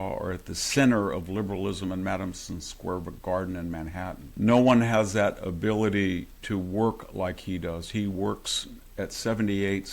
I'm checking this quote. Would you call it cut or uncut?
cut